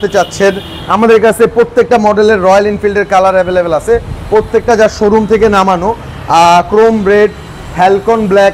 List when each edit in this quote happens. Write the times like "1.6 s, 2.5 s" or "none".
none